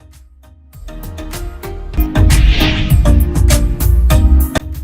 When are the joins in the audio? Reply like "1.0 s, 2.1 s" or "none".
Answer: 1.9 s